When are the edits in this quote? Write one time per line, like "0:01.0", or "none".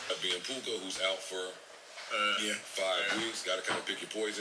none